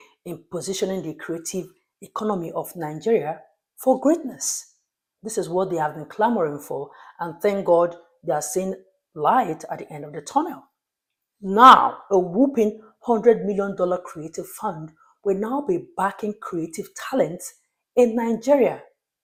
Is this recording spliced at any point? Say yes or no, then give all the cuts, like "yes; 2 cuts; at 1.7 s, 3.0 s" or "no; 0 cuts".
no; 0 cuts